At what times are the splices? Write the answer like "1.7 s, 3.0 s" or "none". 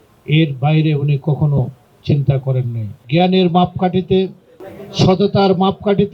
3.0 s